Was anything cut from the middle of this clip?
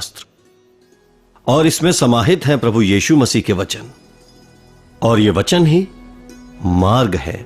no; 0 cuts

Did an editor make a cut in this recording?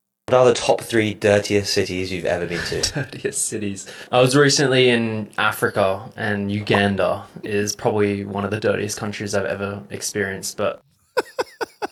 no; 0 cuts

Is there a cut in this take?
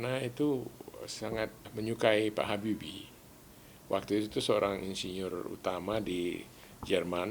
yes; 1 cut; at 1.6 s

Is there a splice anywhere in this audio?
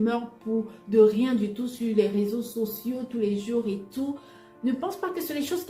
no; 0 cuts

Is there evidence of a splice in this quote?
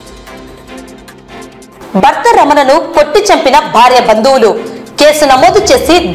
no; 0 cuts

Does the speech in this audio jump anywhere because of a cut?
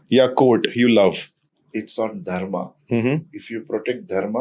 no; 0 cuts

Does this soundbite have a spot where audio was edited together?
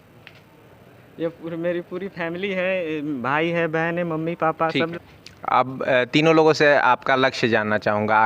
yes; 1 cut; at 4.9 s

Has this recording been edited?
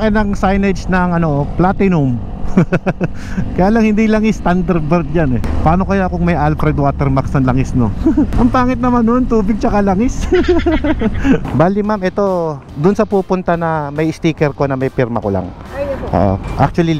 yes; 2 cuts; at 5.5 s, 11.4 s

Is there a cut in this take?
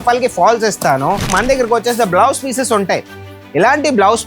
yes; 1 cut; at 1.3 s

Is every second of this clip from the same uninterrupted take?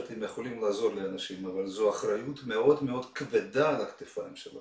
yes; 0 cuts

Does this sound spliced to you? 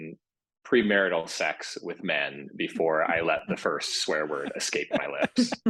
no; 0 cuts

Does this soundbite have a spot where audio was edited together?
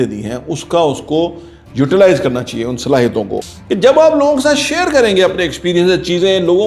yes; 1 cut; at 3.3 s

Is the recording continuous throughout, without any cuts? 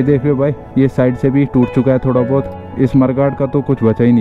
no; 1 cut; at 2.5 s

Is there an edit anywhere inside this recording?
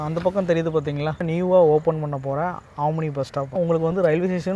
yes; 2 cuts; at 1.2 s, 3.5 s

